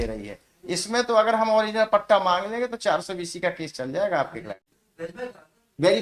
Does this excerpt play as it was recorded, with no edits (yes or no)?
no